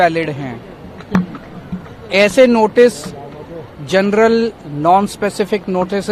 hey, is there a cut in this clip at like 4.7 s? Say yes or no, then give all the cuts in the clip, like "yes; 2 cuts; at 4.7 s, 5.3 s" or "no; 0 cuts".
no; 0 cuts